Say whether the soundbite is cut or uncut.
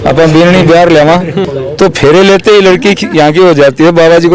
cut